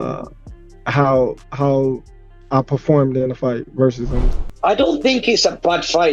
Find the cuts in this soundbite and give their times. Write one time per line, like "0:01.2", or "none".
0:04.3